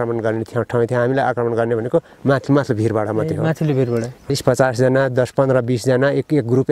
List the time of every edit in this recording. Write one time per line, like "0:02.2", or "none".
0:04.3